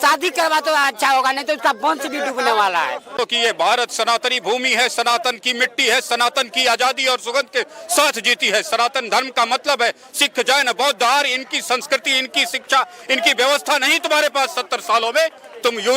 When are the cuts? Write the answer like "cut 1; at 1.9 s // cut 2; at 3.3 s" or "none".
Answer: cut 1; at 3.2 s